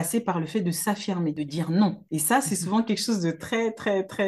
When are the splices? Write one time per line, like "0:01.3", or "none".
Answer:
0:01.4
0:02.0